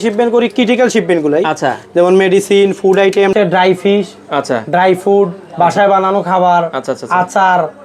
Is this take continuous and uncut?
no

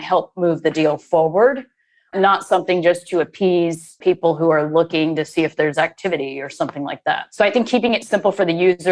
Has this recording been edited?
yes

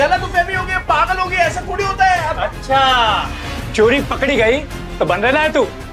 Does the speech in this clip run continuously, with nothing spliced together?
yes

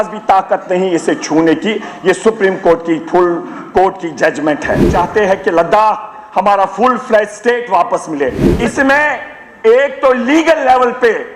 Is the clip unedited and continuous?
no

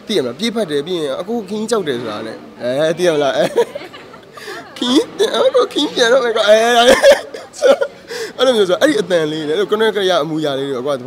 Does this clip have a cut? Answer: no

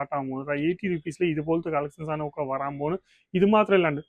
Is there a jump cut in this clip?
no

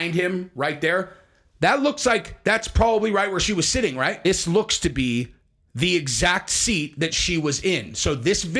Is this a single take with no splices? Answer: no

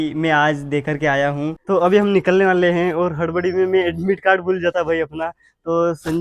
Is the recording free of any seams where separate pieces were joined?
no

